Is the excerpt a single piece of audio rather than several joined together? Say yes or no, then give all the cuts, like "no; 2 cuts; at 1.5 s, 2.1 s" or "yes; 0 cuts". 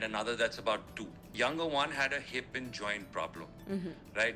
no; 1 cut; at 1.3 s